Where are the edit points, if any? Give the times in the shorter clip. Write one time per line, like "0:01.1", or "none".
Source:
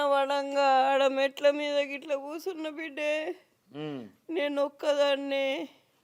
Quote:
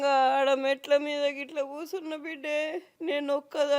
0:02.9